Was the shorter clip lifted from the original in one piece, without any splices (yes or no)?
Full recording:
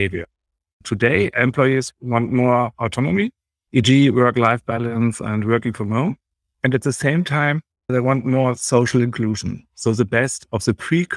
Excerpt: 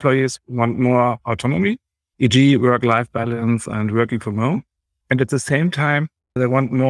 yes